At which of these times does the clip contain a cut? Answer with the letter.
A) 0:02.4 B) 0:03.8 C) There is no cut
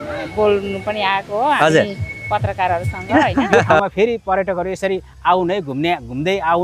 B